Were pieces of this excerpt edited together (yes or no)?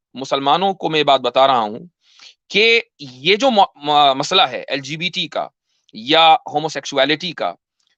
no